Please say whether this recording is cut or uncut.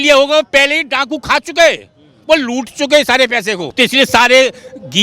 cut